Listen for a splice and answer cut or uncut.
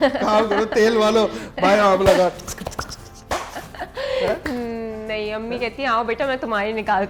uncut